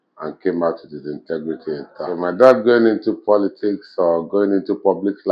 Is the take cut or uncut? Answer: cut